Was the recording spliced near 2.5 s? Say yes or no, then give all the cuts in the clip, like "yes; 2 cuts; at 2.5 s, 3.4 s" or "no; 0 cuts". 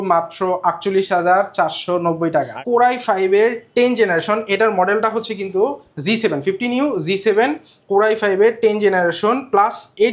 yes; 1 cut; at 2.5 s